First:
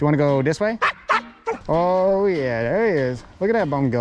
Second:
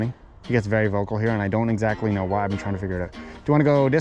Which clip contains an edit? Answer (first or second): first